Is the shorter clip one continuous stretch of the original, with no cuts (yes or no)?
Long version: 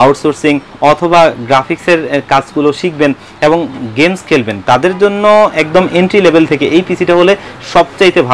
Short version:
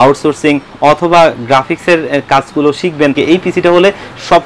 no